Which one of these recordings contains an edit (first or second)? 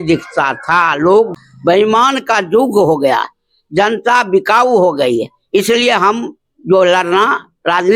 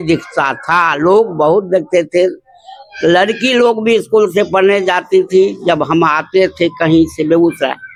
first